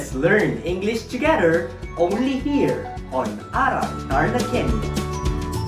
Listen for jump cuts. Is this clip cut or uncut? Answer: uncut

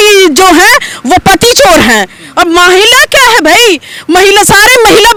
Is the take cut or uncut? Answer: uncut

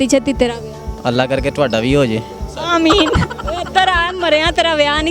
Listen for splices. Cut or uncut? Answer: uncut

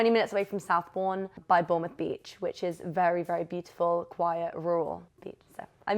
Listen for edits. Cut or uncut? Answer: cut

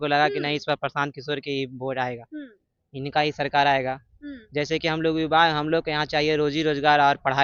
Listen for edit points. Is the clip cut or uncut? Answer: uncut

